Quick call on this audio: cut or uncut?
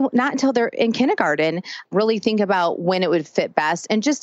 cut